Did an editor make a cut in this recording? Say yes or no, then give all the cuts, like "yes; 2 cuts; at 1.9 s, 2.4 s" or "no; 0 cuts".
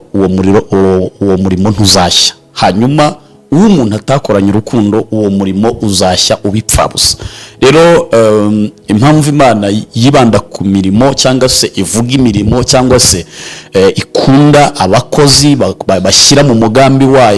no; 0 cuts